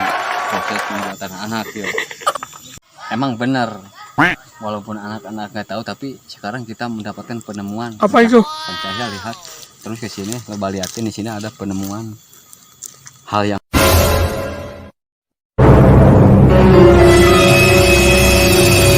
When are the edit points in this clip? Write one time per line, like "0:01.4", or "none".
0:02.3